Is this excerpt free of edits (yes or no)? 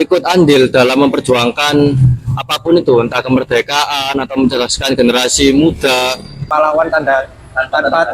no